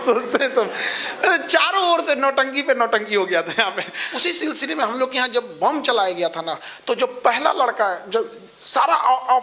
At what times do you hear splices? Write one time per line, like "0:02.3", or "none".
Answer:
0:04.0